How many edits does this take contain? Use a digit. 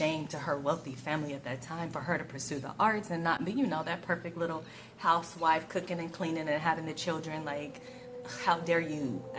0